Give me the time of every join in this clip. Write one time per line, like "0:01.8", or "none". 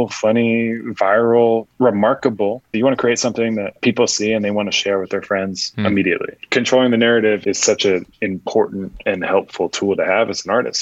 0:02.7
0:03.8
0:05.6
0:06.4
0:07.4
0:08.9